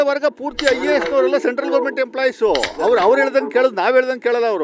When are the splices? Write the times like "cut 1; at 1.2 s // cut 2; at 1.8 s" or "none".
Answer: none